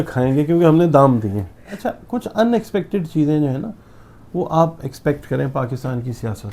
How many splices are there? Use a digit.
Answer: 1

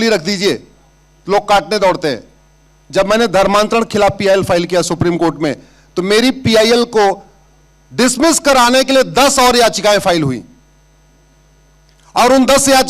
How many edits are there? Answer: 0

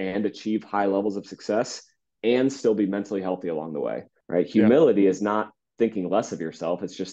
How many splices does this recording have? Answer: 1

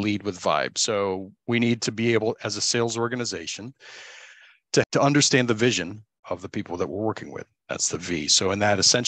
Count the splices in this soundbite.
3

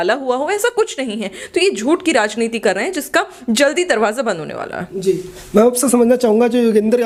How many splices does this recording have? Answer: 0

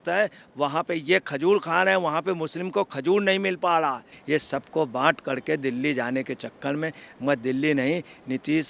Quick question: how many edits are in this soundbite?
1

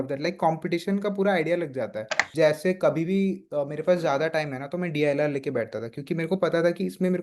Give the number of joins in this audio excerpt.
1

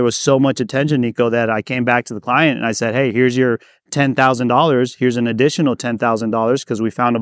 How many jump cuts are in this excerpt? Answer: 0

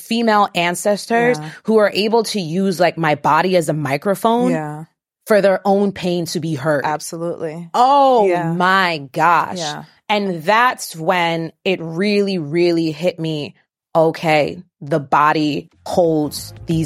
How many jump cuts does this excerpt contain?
0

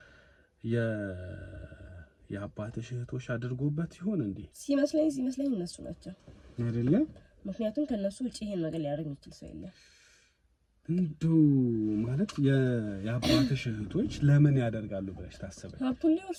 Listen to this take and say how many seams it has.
0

